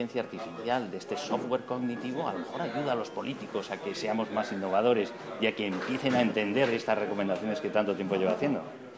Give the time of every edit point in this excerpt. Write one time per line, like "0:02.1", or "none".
none